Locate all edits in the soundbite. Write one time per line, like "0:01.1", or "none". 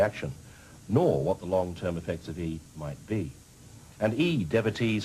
0:01.3